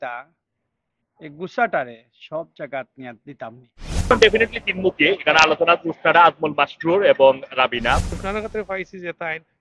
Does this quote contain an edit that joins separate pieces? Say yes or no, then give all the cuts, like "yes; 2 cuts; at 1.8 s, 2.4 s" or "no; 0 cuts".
yes; 2 cuts; at 4.1 s, 8.1 s